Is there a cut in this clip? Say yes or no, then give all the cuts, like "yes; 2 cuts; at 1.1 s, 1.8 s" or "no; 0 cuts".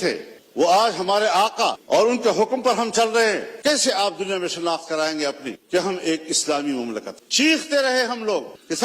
yes; 2 cuts; at 3.5 s, 7.1 s